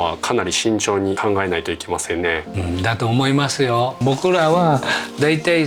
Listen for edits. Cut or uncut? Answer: cut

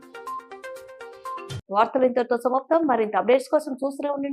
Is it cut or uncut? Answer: uncut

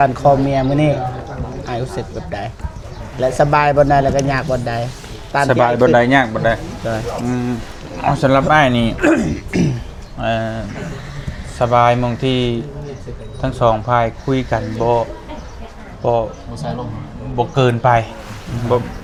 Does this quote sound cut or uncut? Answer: uncut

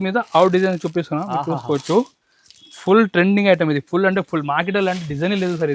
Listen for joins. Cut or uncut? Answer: uncut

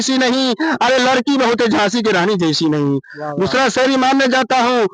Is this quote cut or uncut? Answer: uncut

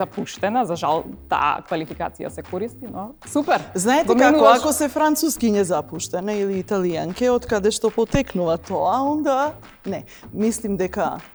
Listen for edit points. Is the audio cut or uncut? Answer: uncut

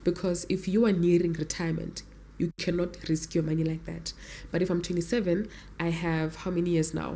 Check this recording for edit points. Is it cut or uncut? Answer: uncut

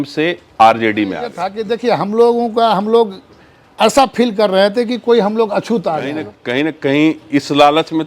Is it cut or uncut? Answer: cut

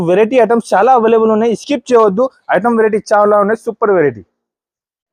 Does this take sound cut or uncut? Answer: uncut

